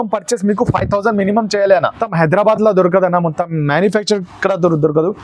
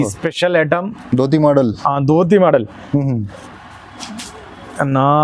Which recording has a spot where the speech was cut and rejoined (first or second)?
first